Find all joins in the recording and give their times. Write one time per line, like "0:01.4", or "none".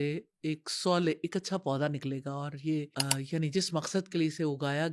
0:02.9